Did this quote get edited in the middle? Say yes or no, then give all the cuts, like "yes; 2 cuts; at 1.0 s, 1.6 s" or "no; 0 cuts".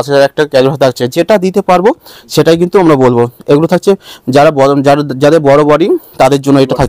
no; 0 cuts